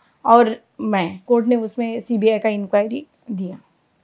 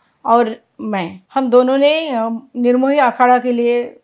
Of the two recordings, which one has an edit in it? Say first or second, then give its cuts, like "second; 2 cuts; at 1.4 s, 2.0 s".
first; 2 cuts; at 1.2 s, 3.1 s